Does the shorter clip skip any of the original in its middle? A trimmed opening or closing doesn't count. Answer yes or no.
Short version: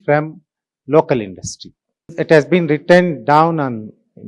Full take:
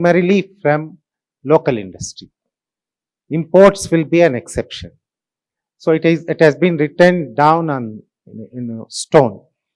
yes